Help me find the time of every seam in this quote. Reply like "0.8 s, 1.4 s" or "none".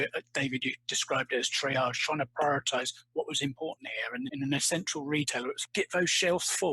4.3 s, 5.6 s

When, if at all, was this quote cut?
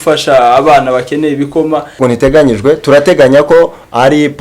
1.9 s

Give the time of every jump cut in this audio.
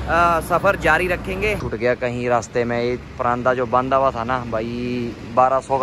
1.7 s

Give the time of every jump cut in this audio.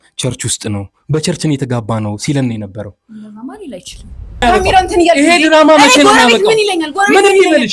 4.4 s

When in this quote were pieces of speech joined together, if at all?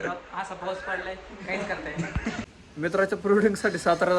2.6 s

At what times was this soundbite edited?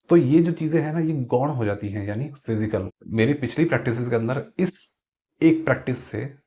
3.0 s

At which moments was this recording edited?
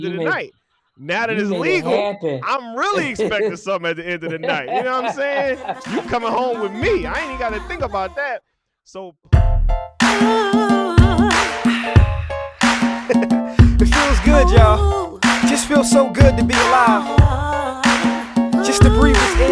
9.0 s

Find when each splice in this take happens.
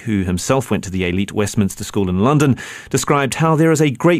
1.3 s

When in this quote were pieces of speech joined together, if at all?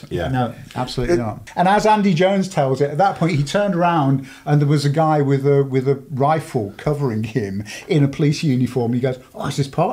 1.4 s

